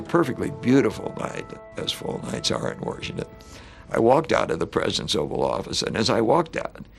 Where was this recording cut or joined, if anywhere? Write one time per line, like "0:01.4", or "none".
0:01.6